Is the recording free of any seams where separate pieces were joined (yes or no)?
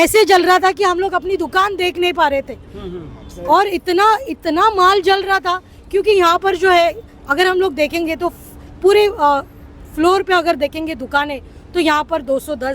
yes